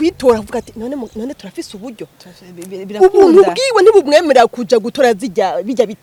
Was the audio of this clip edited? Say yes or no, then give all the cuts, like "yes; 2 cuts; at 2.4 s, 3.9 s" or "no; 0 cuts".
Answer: no; 0 cuts